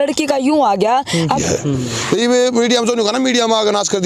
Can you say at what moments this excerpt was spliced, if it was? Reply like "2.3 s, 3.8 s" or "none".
1.4 s